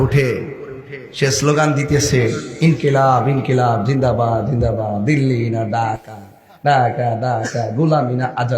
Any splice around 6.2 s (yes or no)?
no